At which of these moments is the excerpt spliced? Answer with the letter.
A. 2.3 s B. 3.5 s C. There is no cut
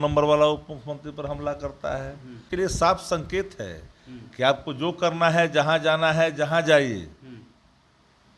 A